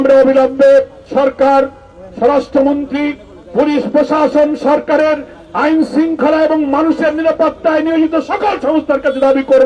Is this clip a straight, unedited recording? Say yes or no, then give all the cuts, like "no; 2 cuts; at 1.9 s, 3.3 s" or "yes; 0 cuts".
no; 1 cut; at 1.0 s